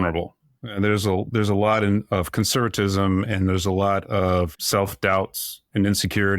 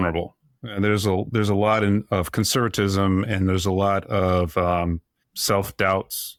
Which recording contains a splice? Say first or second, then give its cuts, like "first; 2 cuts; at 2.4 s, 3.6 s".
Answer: first; 1 cut; at 4.5 s